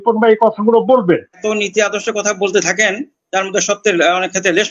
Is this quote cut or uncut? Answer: cut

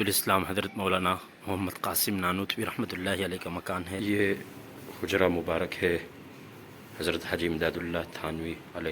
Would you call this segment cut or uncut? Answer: cut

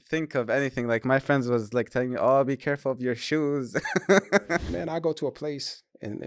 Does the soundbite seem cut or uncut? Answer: cut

